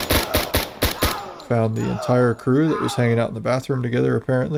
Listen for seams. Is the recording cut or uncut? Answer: uncut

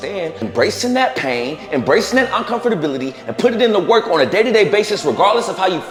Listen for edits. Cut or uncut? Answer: uncut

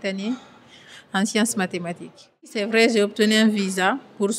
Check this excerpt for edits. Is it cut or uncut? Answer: cut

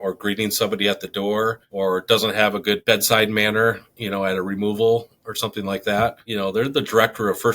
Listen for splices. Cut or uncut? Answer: cut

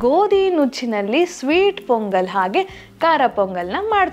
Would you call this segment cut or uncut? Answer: uncut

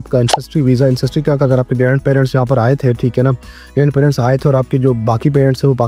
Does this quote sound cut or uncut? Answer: uncut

